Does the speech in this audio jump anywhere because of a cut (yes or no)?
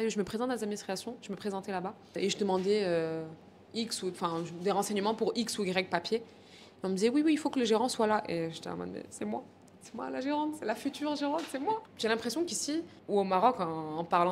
yes